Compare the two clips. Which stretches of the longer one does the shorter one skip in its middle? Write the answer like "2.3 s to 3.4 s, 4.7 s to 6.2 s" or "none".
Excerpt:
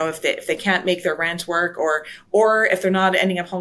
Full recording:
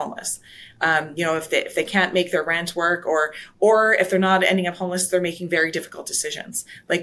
none